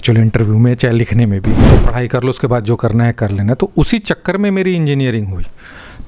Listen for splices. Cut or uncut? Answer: cut